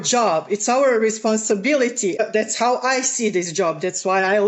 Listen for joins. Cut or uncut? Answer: uncut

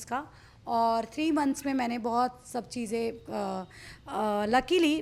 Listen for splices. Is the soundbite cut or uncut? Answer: uncut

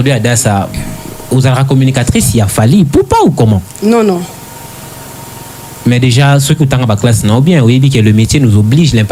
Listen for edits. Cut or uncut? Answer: uncut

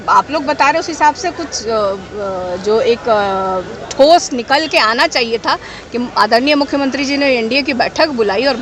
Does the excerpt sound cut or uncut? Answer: uncut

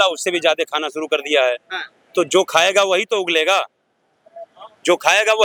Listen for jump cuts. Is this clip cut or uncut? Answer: uncut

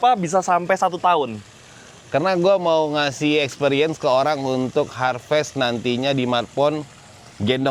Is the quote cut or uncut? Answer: uncut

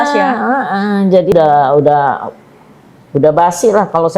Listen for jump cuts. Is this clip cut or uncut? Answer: cut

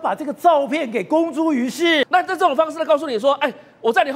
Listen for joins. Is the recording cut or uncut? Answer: cut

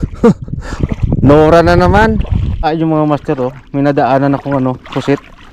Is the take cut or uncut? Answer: cut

